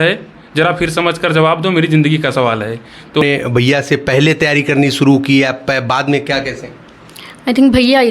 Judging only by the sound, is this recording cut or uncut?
cut